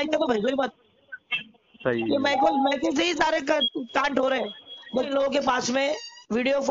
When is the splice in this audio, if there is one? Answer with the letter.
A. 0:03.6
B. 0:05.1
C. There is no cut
B